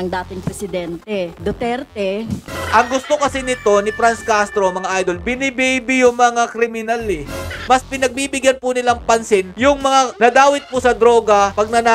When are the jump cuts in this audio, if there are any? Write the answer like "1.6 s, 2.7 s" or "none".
1.4 s, 2.5 s, 7.6 s